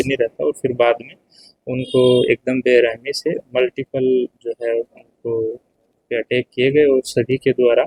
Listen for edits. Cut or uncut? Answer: uncut